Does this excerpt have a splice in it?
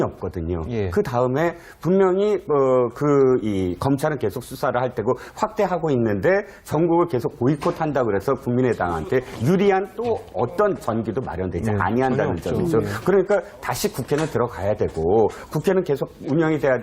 yes; 1 cut; at 15.6 s

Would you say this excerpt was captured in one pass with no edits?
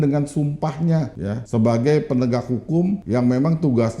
no; 2 cuts; at 1.3 s, 3.0 s

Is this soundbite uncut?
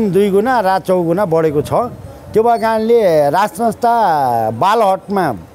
yes; 0 cuts

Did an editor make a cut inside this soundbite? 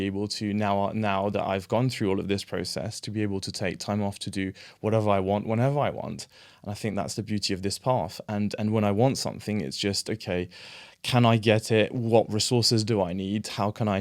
no; 0 cuts

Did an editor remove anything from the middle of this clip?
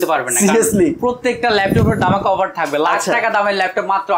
no; 0 cuts

